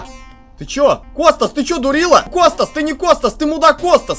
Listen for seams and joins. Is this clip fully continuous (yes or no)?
no